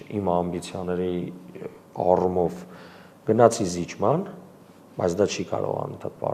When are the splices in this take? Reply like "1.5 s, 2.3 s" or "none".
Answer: none